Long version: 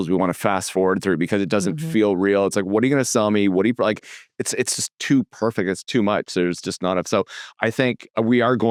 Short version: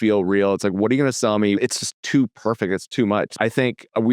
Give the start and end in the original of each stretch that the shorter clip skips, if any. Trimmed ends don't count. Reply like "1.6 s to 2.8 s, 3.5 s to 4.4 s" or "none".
3.5 s to 4.6 s, 6.3 s to 7.5 s